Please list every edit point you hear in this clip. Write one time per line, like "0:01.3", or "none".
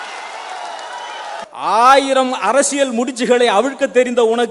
0:01.5